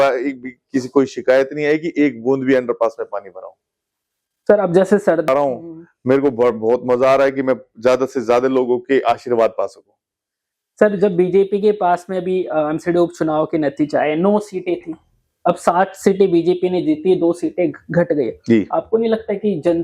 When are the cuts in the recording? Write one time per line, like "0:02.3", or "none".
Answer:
0:05.3